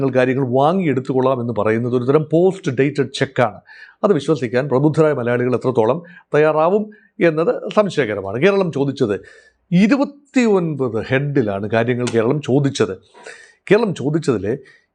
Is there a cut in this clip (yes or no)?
no